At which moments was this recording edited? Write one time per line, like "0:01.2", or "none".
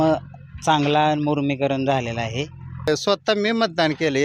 0:02.9